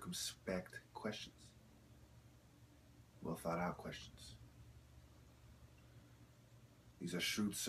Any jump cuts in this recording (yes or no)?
yes